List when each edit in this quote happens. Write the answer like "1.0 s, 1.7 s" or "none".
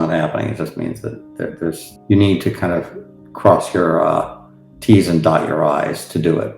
1.9 s